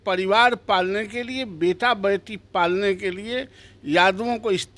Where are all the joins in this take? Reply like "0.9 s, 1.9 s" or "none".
none